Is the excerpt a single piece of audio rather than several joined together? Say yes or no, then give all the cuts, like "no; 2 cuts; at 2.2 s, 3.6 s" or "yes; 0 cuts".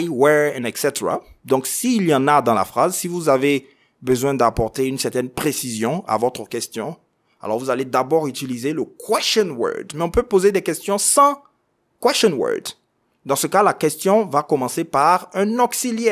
yes; 0 cuts